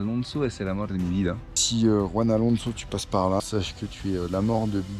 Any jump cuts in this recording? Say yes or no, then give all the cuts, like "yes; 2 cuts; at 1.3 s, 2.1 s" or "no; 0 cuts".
yes; 2 cuts; at 1.6 s, 3.4 s